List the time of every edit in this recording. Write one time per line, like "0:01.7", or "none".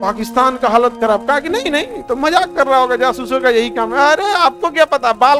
none